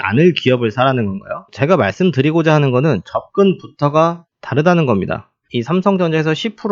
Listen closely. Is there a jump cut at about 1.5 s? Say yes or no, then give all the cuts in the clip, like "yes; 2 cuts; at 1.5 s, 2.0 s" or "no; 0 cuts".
yes; 2 cuts; at 1.5 s, 5.4 s